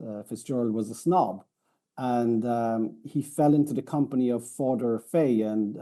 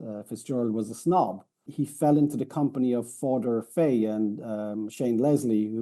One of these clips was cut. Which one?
second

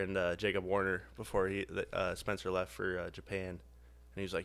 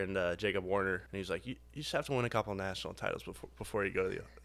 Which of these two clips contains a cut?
second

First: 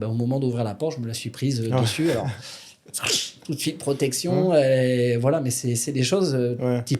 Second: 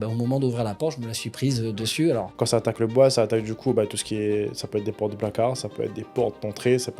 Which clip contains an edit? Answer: second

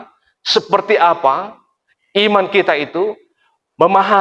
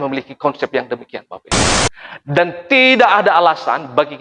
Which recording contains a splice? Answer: second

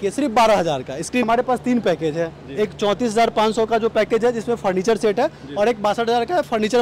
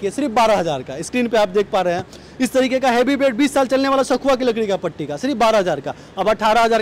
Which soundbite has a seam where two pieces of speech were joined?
first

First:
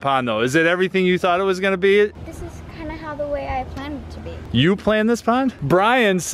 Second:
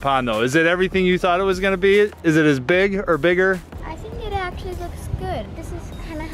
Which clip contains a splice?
first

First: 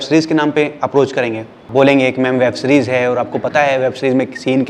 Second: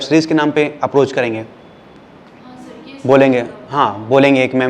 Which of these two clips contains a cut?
first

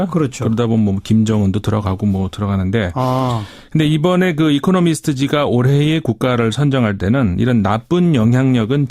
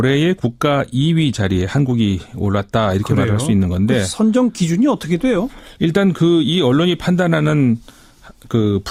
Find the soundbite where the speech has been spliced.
first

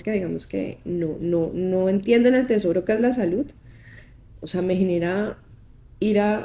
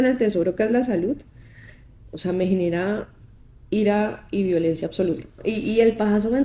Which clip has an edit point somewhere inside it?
second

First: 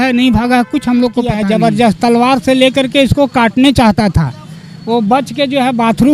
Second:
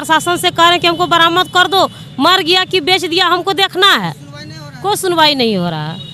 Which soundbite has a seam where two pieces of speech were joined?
first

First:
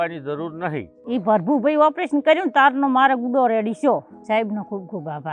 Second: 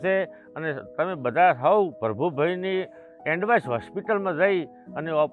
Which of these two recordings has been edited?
first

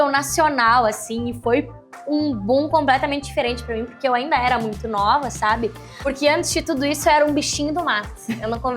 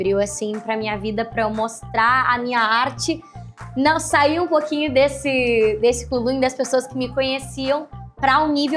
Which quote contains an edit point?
first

